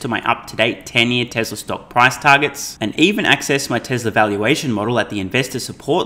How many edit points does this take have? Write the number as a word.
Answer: zero